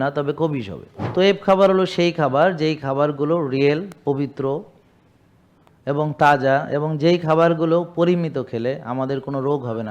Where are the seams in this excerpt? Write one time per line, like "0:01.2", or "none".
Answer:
0:01.0